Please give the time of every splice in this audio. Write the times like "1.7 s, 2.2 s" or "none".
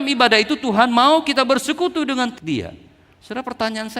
2.4 s